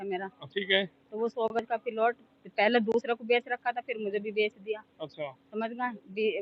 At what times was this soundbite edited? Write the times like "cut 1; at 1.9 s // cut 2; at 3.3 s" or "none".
none